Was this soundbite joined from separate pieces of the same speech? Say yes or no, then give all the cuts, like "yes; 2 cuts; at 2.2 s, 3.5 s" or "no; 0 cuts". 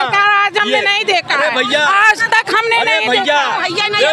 no; 0 cuts